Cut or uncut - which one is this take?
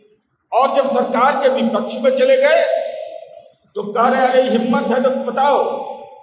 uncut